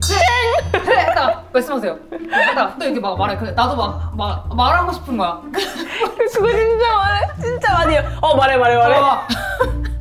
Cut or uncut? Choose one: uncut